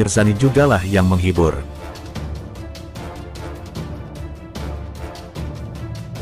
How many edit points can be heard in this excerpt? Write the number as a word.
one